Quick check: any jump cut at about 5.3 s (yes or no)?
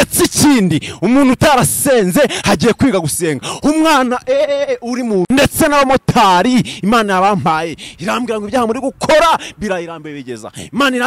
yes